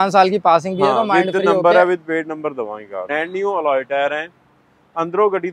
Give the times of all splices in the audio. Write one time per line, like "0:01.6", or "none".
0:03.0

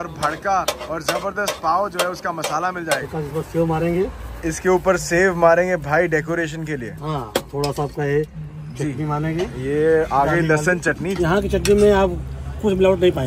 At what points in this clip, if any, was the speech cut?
0:03.0
0:11.2

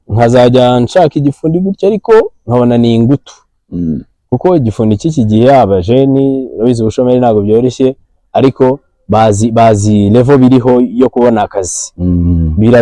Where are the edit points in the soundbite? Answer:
none

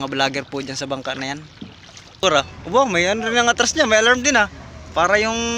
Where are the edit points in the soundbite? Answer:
0:02.2

